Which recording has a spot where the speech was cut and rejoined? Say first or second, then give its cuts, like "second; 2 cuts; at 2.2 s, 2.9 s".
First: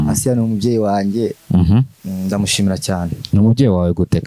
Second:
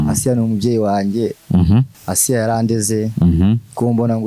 second; 1 cut; at 1.9 s